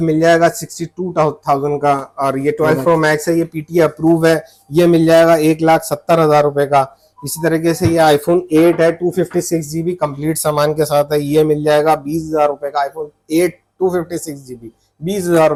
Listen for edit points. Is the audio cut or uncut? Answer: uncut